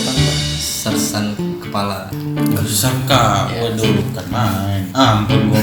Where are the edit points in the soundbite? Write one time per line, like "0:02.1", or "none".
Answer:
none